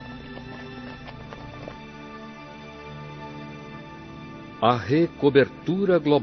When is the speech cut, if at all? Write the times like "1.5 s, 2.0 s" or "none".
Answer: none